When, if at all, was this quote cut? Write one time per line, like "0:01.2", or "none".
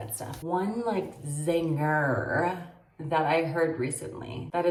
none